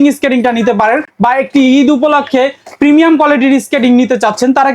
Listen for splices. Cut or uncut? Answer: uncut